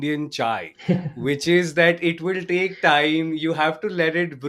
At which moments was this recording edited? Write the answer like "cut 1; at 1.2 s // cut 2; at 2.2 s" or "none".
none